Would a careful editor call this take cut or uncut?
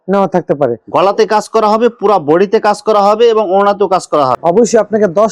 cut